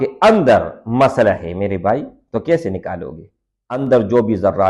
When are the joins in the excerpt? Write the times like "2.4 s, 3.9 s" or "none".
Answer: 3.8 s